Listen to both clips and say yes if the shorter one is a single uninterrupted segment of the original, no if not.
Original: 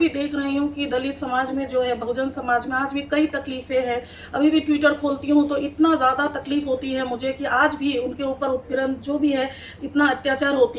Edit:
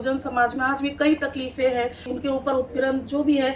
no